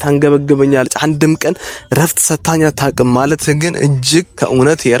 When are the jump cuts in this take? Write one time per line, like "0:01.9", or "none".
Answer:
none